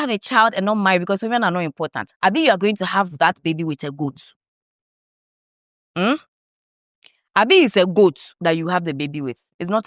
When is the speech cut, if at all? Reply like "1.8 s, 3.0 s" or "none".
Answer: none